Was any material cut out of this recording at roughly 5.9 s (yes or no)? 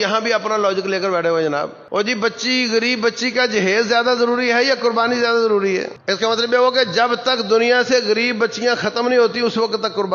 yes